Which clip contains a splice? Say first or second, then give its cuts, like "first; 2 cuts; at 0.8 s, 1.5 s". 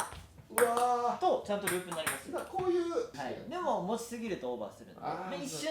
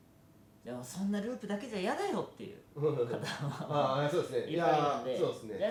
first; 1 cut; at 3.2 s